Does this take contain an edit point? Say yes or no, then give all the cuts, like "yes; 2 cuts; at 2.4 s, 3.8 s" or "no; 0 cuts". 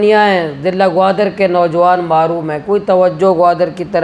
no; 0 cuts